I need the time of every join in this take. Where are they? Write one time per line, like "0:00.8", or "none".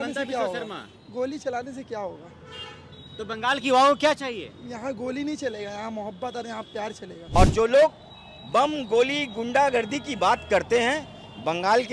0:07.3